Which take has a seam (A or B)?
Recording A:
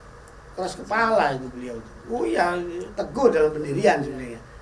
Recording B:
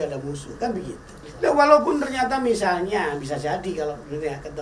B